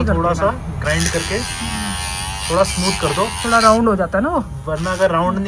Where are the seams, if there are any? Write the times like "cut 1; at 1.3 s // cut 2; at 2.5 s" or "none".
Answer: none